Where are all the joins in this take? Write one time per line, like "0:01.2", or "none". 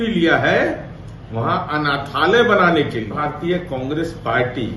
0:03.1